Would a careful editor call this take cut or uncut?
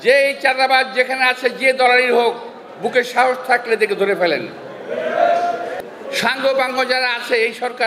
cut